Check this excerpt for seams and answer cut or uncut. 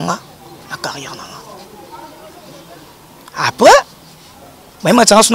uncut